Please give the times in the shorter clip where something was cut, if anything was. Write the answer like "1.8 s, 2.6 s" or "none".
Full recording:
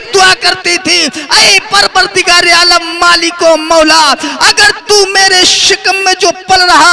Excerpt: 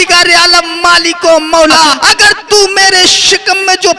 1.9 s

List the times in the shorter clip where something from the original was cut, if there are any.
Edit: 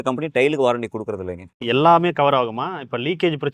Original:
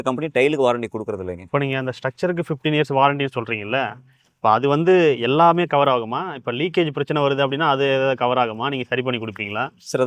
1.6 s

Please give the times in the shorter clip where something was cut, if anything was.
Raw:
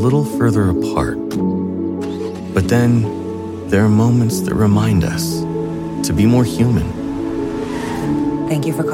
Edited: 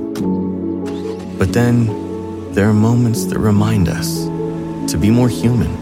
none

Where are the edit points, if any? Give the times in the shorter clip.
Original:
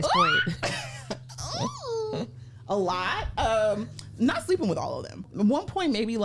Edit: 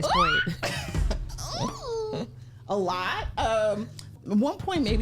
4.0 s

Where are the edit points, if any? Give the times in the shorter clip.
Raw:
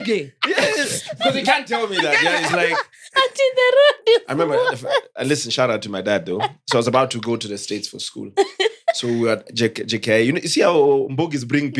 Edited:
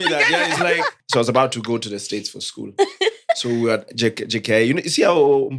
1.0 s

